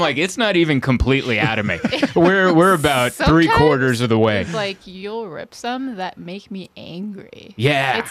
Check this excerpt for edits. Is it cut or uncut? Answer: uncut